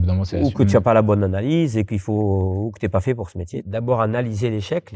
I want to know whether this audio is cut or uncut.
cut